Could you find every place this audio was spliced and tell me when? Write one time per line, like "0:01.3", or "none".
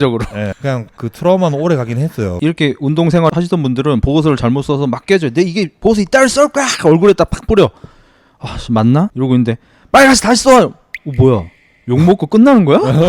0:02.3